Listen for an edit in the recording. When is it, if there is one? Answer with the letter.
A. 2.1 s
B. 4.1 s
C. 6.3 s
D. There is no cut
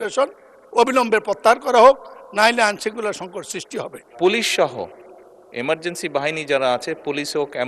B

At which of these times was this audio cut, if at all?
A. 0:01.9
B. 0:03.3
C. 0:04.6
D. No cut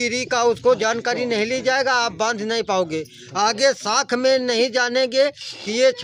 D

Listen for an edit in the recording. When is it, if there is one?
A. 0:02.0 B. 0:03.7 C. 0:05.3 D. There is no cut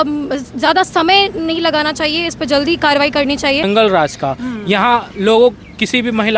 B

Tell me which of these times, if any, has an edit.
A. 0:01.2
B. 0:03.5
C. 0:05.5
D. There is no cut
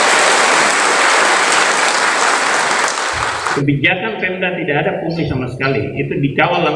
B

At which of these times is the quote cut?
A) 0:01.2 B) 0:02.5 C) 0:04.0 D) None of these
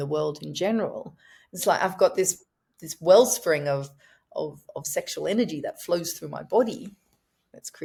D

